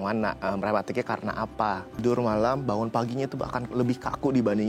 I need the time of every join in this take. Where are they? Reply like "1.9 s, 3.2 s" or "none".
2.0 s